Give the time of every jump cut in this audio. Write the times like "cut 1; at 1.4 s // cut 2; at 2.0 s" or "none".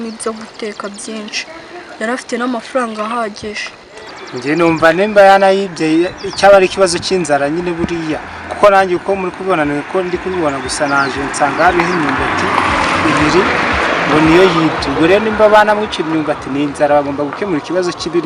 cut 1; at 4.3 s